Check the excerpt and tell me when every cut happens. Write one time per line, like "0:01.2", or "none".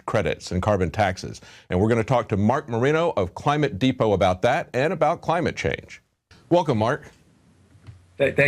0:04.1